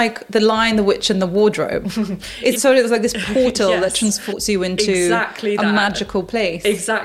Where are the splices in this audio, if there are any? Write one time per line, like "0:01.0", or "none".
0:02.5
0:04.4